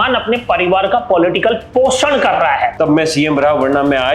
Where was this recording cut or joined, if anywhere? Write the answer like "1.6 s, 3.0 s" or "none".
2.7 s